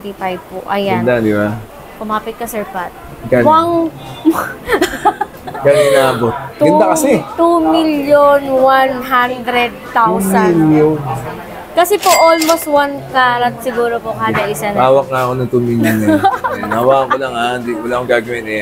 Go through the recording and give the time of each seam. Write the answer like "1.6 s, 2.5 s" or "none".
none